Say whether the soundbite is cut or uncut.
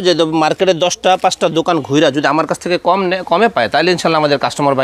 uncut